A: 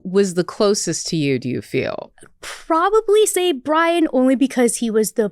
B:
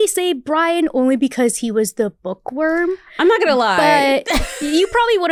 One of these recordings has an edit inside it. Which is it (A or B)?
A